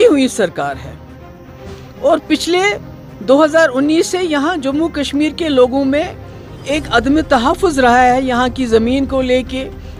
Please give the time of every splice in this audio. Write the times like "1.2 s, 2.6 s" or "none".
none